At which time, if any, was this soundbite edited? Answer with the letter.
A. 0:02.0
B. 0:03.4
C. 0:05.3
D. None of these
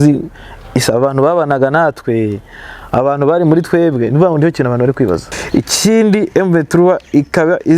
C